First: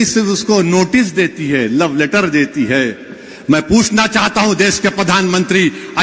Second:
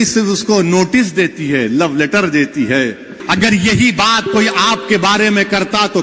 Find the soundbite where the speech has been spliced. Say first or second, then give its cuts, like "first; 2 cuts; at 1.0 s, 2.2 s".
second; 1 cut; at 3.2 s